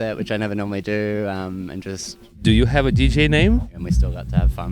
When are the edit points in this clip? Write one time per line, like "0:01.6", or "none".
0:02.4
0:03.7

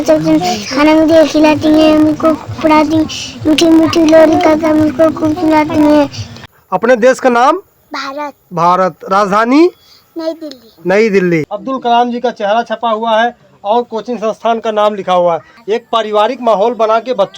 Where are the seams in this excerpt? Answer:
0:06.6
0:11.4
0:15.5

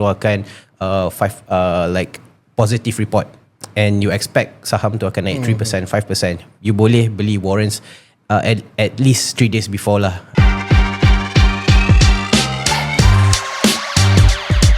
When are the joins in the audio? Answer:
0:10.2

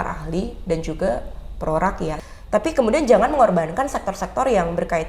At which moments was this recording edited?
0:02.3

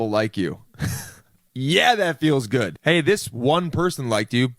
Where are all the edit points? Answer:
none

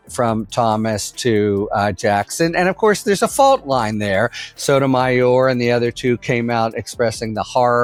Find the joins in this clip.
none

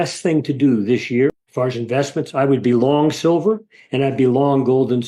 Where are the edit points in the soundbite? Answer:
0:01.4

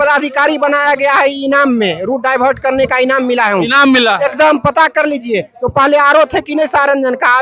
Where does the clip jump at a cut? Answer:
none

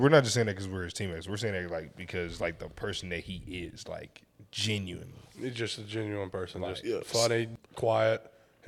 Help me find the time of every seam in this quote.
0:07.5

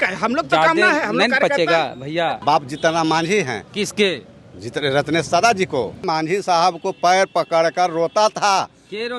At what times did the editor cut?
0:02.4
0:06.0

